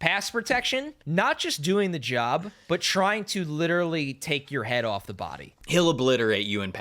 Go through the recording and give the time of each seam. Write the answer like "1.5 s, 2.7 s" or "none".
1.0 s, 2.5 s, 5.7 s